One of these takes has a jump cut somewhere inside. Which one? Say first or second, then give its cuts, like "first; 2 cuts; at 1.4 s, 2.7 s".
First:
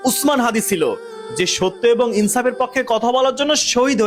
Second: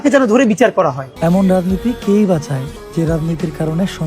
second; 2 cuts; at 1.0 s, 2.8 s